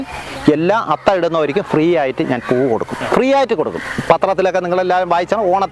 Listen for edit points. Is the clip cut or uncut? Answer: cut